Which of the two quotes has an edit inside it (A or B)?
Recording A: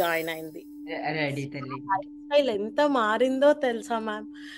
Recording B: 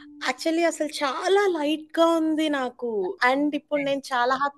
B